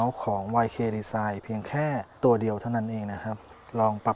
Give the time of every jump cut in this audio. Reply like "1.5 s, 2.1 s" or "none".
none